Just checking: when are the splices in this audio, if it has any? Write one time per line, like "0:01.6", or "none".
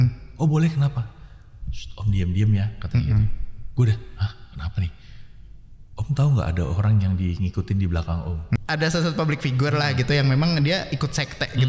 0:08.6

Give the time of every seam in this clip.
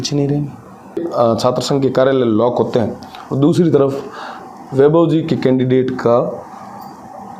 0:01.0

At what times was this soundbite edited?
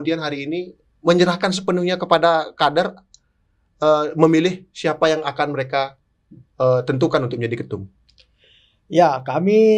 none

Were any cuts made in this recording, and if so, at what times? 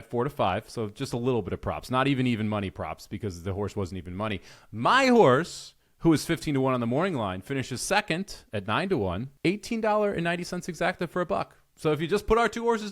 0:09.3

